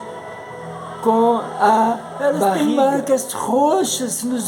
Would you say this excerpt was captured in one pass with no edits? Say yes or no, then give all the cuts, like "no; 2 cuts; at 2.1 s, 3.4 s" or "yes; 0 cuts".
no; 1 cut; at 2.6 s